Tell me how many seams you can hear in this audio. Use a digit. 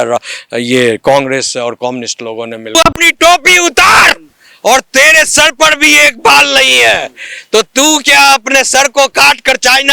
1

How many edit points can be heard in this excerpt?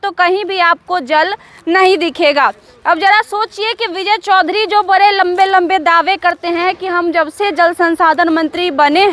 0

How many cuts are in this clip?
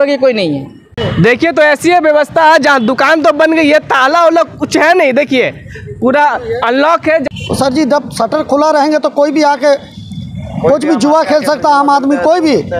2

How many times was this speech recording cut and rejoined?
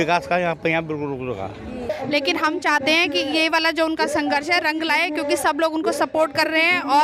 1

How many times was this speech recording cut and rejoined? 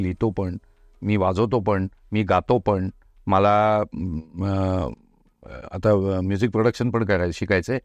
0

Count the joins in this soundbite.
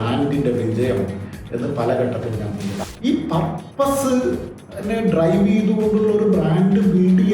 1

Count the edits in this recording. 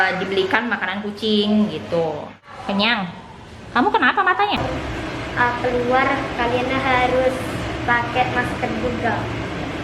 1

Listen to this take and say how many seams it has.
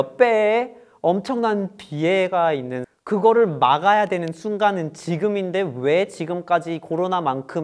1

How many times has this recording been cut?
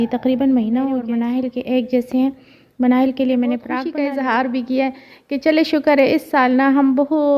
2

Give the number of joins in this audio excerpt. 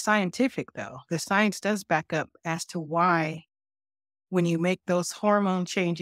0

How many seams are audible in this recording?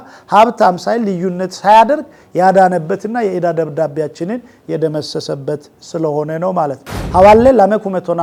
0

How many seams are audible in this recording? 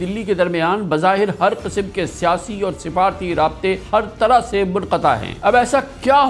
2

